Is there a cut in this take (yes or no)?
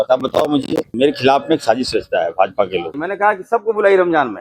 yes